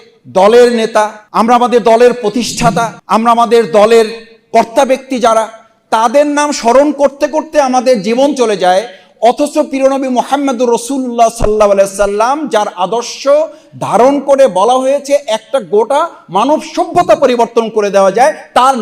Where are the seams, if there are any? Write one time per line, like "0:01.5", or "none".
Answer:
0:01.2
0:03.0